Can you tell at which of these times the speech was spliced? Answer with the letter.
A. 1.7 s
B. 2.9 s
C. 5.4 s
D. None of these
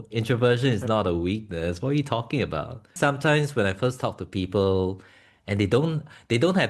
B